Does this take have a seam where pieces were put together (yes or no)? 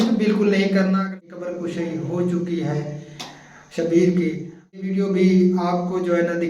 yes